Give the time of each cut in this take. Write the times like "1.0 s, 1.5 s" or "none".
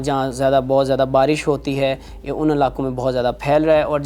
none